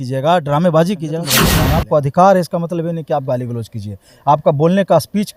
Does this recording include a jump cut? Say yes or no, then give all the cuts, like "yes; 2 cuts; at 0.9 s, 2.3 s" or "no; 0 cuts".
yes; 1 cut; at 1.4 s